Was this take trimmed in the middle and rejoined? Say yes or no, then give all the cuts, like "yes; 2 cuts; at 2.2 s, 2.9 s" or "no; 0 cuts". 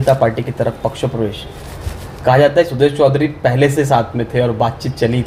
no; 0 cuts